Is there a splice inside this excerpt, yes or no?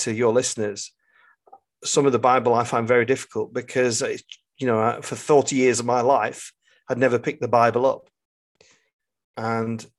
no